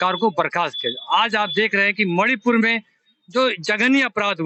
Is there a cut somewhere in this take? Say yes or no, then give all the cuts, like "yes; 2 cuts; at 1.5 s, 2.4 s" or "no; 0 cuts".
no; 0 cuts